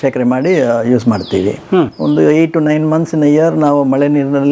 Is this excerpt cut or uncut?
uncut